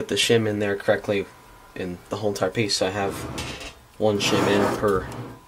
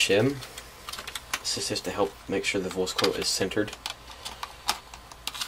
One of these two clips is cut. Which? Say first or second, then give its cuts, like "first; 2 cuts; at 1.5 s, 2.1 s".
second; 1 cut; at 3.3 s